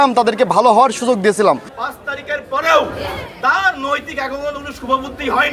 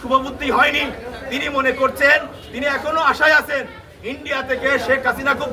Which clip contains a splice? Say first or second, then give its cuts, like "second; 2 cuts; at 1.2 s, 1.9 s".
first; 1 cut; at 1.8 s